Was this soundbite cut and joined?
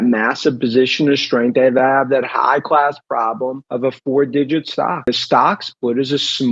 yes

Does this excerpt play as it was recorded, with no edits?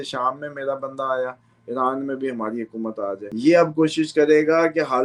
no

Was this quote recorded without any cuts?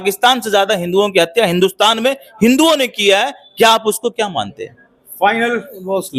yes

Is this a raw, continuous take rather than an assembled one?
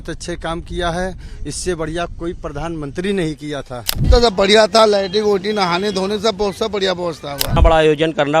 no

